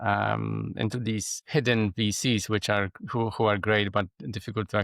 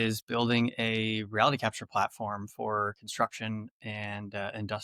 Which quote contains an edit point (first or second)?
first